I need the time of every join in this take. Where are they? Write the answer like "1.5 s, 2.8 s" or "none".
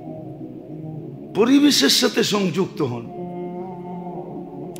0.9 s

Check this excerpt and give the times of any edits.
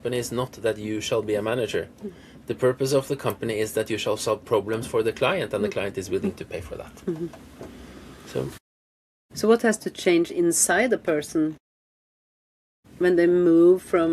none

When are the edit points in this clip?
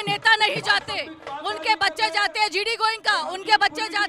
none

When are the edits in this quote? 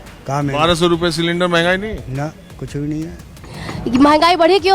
3.5 s

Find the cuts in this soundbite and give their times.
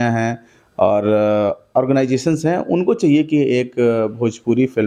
none

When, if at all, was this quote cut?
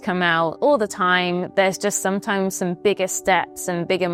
none

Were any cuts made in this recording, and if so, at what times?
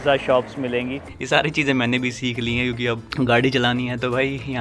1.1 s, 3.1 s

